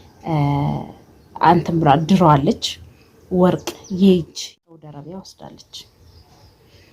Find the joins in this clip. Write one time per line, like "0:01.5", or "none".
0:04.4

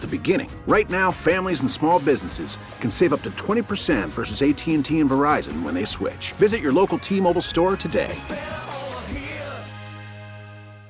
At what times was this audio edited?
none

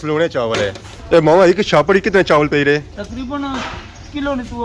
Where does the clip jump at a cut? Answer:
none

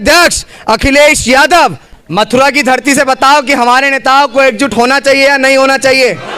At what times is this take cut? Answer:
0:01.9

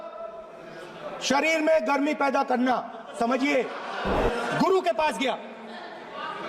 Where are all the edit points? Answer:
0:04.2

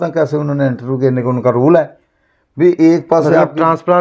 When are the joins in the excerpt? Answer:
none

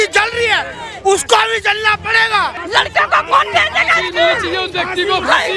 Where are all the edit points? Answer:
0:02.6

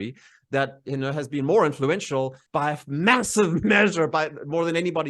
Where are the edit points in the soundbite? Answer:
0:02.4

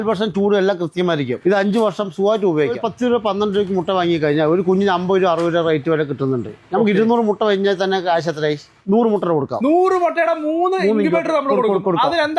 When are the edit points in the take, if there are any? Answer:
0:01.4
0:02.8
0:08.7

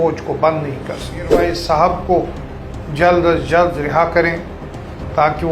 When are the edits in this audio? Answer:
0:01.4

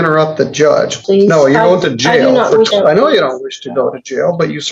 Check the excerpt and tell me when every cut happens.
0:01.0
0:02.7

